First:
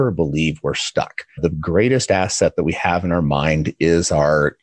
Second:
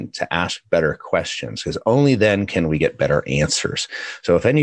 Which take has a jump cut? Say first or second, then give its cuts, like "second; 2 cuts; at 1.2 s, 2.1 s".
first; 1 cut; at 1.4 s